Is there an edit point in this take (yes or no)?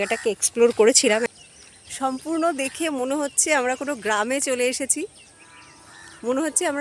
yes